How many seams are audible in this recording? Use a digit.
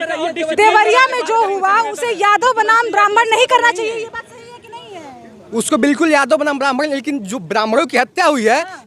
0